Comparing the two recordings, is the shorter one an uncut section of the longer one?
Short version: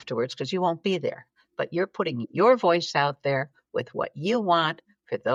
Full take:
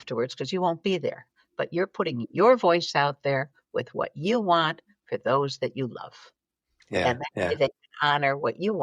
yes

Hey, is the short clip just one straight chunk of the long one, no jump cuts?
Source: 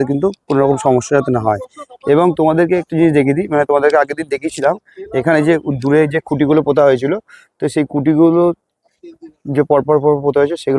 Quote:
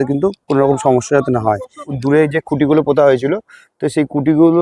no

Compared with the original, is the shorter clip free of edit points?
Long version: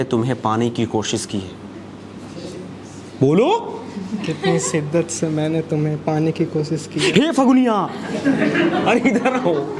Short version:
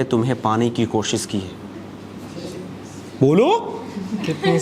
yes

